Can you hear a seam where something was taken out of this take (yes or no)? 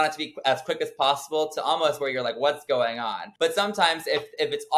yes